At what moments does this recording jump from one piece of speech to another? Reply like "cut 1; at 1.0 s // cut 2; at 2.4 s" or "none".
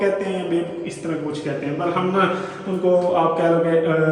none

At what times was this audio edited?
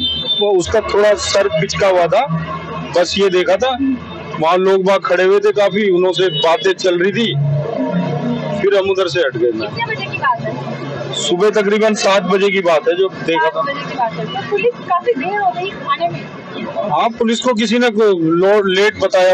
none

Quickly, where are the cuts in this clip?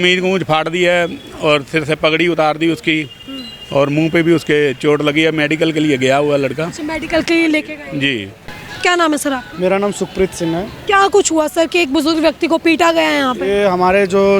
none

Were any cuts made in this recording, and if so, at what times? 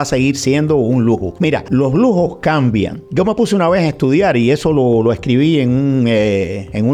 none

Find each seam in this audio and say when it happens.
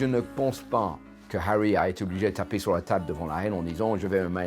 none

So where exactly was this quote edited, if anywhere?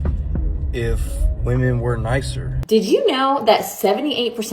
cut 1; at 2.7 s

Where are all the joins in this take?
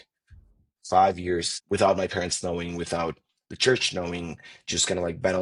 none

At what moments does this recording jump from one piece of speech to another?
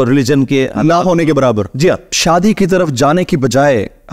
cut 1; at 2.1 s

